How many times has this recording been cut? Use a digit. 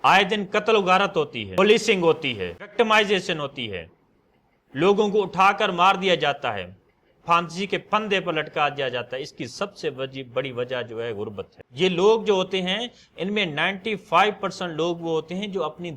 3